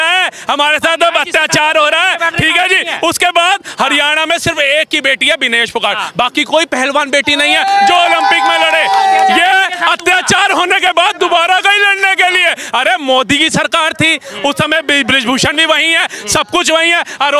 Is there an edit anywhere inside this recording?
no; 0 cuts

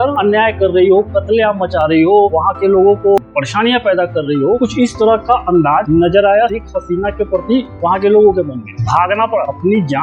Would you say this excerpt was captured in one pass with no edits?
no; 1 cut; at 3.2 s

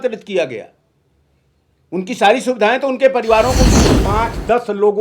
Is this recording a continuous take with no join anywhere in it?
no; 1 cut; at 3.8 s

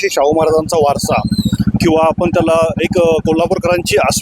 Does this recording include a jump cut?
no; 0 cuts

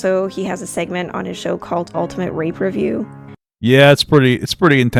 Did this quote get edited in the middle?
no; 0 cuts

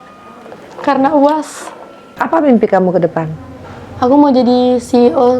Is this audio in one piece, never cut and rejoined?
no; 1 cut; at 2.2 s

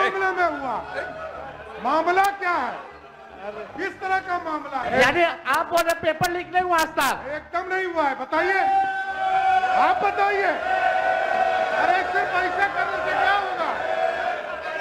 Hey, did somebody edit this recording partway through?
yes; 1 cut; at 4.8 s

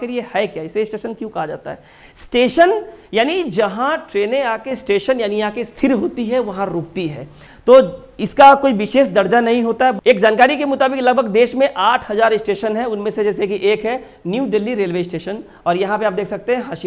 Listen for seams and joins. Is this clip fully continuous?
yes; 0 cuts

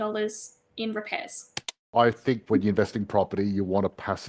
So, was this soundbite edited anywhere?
yes; 1 cut; at 1.8 s

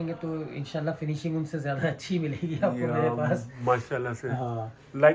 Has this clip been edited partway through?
no; 0 cuts

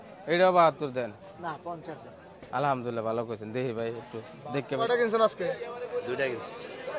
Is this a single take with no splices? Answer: no; 1 cut; at 4.9 s

